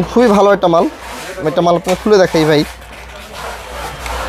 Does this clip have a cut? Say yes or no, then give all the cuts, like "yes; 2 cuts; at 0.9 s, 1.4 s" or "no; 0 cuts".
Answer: no; 0 cuts